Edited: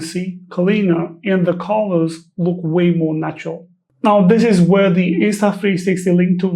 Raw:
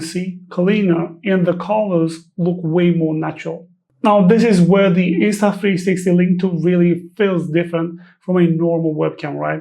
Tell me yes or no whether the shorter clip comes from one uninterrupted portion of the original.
yes